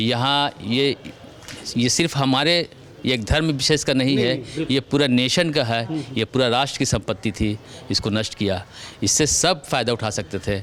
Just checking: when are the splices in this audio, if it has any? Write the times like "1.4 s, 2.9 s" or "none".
none